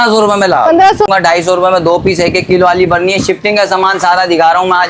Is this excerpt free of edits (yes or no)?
no